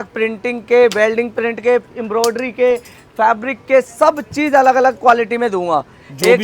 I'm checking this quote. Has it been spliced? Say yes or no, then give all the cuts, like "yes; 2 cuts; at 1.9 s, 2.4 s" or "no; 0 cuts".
no; 0 cuts